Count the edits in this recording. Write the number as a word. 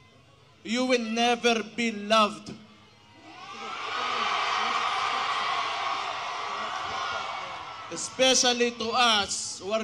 one